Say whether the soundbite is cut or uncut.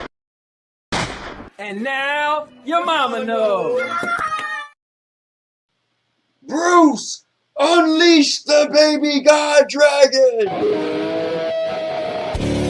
cut